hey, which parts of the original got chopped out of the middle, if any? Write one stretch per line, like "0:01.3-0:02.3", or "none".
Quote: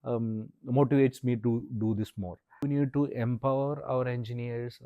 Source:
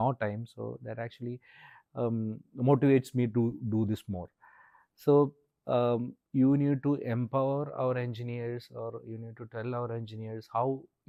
0:04.6-0:06.6

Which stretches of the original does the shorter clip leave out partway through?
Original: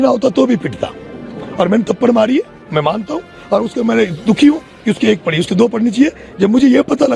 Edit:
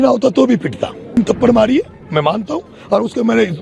0:01.2-0:01.8

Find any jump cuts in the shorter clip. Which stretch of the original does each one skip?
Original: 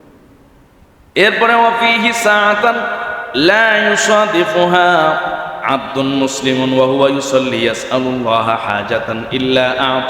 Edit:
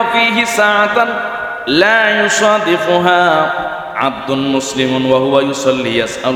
none

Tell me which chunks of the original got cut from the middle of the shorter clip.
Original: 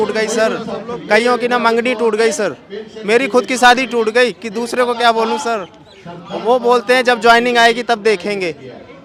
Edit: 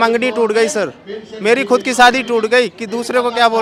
none

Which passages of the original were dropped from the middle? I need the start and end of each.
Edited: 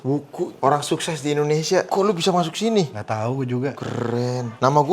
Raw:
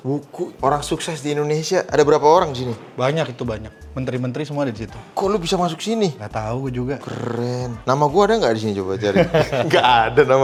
0:01.9-0:05.1

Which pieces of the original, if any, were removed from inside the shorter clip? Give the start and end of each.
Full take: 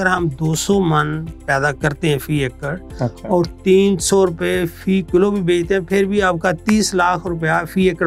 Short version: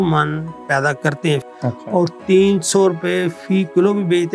0:02.2-0:02.8

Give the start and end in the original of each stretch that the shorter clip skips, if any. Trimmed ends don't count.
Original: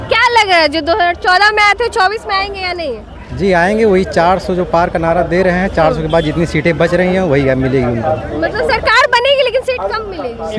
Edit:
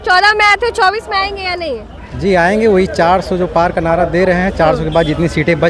none

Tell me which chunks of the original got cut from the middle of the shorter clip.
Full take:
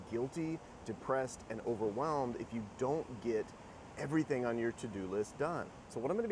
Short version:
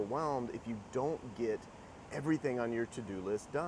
none

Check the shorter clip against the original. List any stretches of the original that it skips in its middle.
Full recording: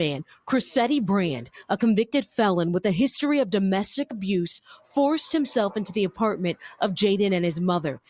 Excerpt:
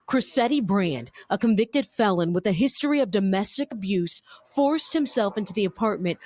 none

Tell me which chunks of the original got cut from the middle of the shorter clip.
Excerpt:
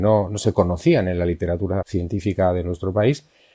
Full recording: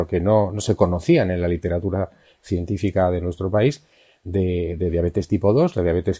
0:02.1-0:02.4

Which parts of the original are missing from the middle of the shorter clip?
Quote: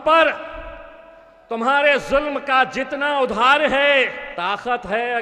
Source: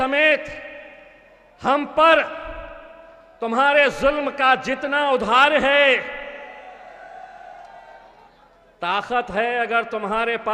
0:06.1-0:08.7

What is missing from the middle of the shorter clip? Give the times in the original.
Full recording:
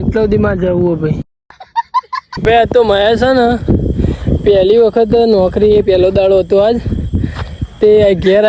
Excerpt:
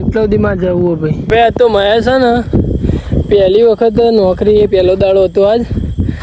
0:01.2-0:02.3

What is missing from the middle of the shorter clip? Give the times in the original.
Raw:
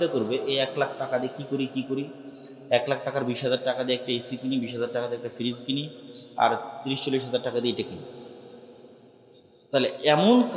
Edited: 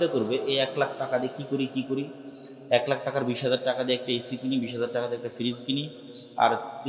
none

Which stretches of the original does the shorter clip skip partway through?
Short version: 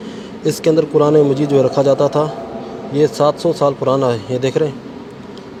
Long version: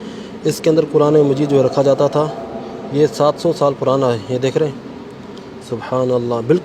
none

